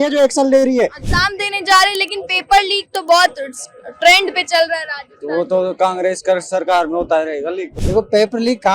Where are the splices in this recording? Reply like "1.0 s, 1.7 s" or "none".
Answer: 1.0 s, 7.7 s